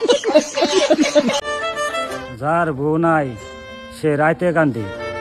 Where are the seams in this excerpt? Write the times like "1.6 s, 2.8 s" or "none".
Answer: 1.2 s